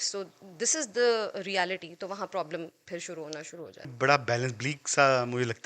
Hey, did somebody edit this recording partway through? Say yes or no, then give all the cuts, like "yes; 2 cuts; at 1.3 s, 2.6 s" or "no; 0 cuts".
yes; 1 cut; at 3.9 s